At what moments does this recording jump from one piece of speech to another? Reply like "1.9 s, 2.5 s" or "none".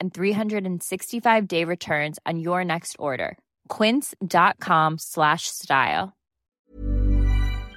6.6 s